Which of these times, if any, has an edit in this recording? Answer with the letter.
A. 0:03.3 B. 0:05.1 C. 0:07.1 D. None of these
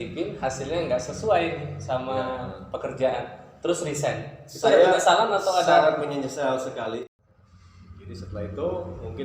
C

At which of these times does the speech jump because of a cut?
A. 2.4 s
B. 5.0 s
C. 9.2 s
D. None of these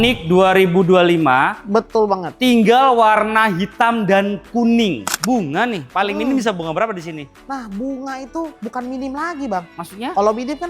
B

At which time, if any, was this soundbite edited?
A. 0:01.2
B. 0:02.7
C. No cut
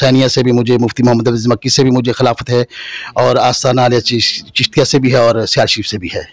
C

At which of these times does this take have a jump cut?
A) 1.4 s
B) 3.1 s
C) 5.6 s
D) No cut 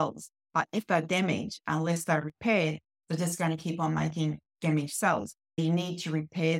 C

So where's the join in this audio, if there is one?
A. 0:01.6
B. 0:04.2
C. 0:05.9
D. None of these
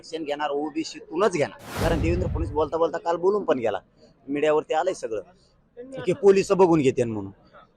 A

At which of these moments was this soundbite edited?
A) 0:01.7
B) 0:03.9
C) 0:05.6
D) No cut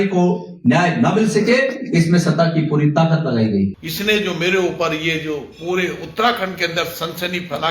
B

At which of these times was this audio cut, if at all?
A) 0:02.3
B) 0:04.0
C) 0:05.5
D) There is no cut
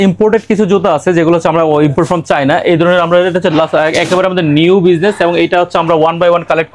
D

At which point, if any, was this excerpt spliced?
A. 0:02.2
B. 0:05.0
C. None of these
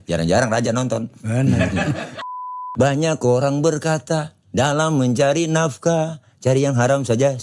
A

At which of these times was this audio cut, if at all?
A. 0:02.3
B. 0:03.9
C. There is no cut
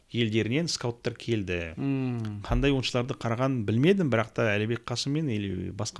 C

